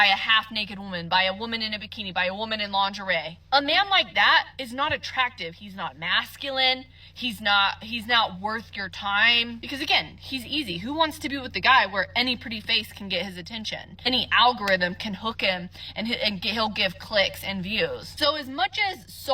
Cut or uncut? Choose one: cut